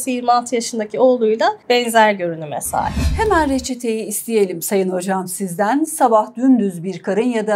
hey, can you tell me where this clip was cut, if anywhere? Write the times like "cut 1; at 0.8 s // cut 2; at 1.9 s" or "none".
cut 1; at 1.6 s // cut 2; at 3.0 s